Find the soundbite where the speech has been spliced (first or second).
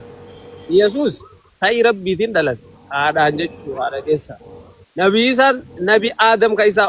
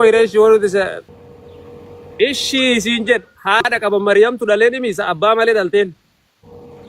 second